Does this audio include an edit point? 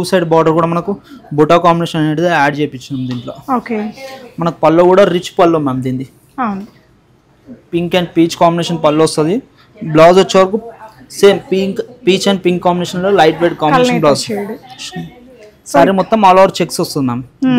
no; 0 cuts

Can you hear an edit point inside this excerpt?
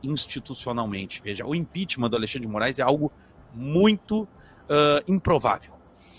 no; 0 cuts

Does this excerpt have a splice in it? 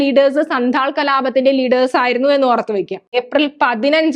yes; 1 cut; at 3.2 s

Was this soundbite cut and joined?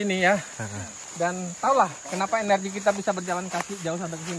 no; 0 cuts

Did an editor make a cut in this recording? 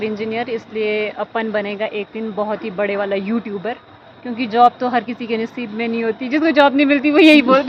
no; 0 cuts

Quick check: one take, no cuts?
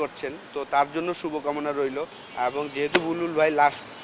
no; 1 cut; at 2.2 s

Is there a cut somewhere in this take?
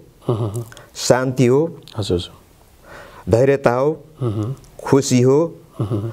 no; 0 cuts

